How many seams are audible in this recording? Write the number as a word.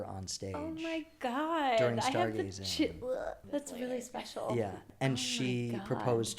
two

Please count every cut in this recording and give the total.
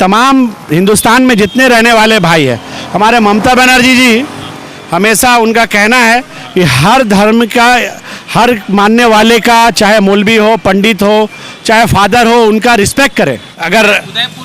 one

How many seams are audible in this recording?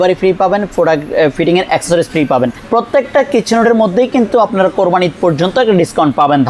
one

